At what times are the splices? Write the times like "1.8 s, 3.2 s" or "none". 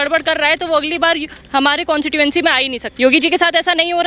2.9 s